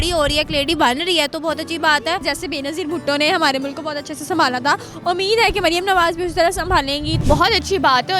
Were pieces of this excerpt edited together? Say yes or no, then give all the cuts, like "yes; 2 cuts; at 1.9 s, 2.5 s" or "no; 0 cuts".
yes; 2 cuts; at 2.2 s, 7.2 s